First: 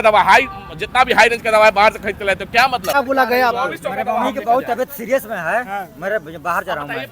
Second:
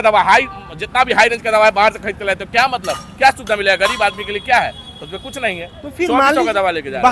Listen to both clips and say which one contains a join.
first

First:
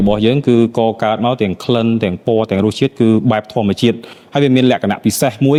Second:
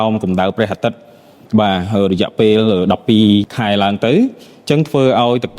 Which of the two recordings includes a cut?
second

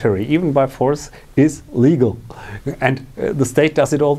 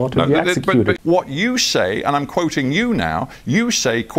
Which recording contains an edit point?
second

